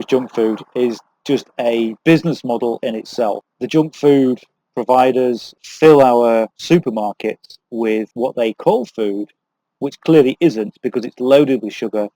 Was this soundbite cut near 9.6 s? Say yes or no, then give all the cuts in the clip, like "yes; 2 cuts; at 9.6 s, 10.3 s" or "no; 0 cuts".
no; 5 cuts; at 2.0 s, 3.4 s, 5.5 s, 6.6 s, 8.1 s